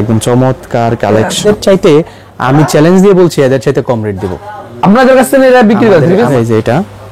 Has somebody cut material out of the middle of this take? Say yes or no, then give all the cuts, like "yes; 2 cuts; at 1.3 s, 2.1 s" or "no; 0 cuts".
yes; 2 cuts; at 1.4 s, 6.3 s